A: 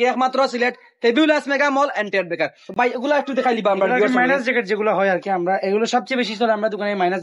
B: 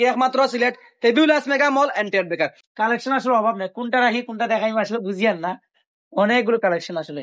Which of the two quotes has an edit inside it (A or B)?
B